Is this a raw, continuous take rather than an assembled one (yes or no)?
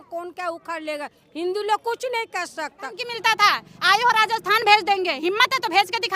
no